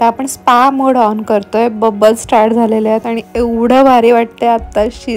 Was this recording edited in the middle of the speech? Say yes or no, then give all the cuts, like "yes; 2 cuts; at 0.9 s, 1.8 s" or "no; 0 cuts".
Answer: no; 0 cuts